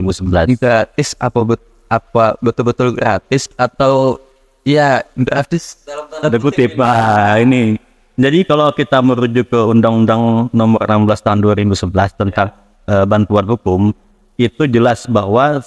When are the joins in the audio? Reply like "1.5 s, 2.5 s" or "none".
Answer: none